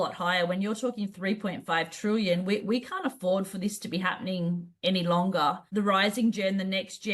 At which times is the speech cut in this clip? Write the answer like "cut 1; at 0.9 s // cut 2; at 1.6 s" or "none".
cut 1; at 5.6 s